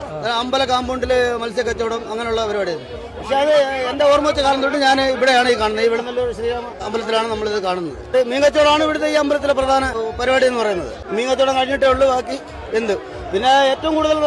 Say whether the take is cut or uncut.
cut